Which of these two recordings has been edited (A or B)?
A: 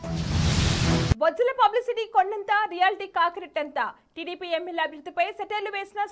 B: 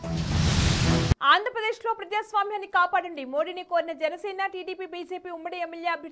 B